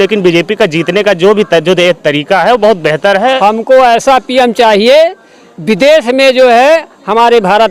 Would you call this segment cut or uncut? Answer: cut